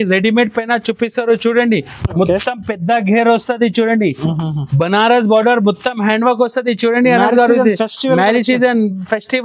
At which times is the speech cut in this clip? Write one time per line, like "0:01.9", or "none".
none